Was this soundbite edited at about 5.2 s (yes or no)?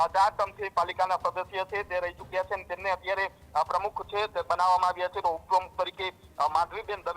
yes